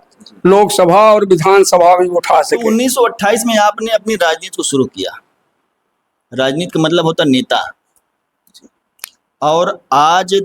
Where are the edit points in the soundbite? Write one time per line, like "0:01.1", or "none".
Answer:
0:02.7